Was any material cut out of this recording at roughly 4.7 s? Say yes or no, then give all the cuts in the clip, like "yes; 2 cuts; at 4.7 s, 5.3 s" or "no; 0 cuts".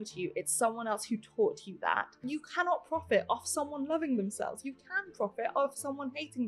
no; 1 cut; at 2.3 s